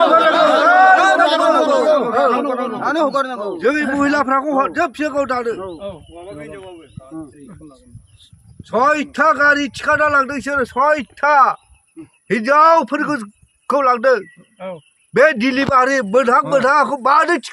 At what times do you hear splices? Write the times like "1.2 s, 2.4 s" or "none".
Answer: none